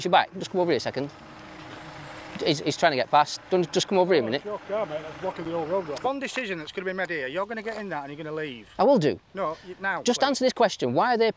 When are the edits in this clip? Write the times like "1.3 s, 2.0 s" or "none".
6.0 s

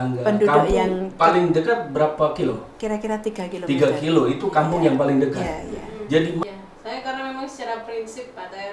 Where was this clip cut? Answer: 6.4 s

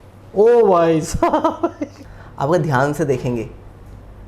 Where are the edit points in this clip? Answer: 1.9 s

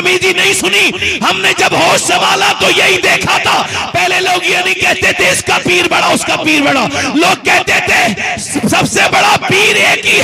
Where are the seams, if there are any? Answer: none

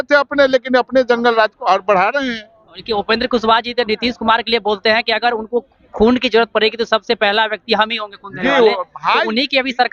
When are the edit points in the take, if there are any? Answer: none

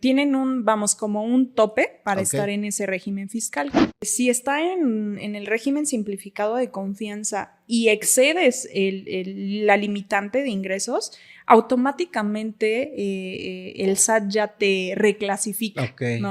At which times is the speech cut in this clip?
3.9 s

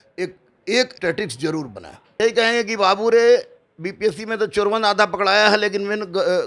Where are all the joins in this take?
0.9 s, 2.1 s

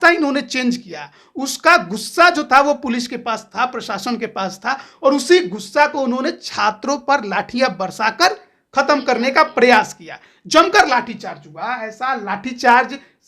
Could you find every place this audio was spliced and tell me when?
none

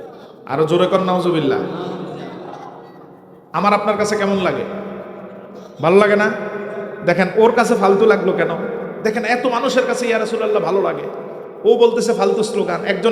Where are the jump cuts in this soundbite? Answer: 6.6 s

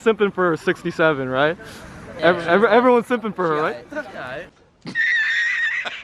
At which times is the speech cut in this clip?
2.2 s

